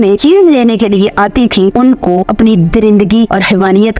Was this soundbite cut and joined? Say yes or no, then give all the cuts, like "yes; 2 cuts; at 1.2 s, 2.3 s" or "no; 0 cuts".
no; 0 cuts